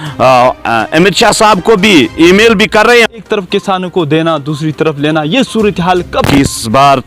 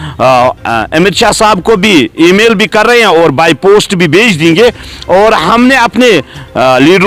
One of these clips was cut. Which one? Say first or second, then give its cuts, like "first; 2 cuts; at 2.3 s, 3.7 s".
first; 2 cuts; at 3.1 s, 6.3 s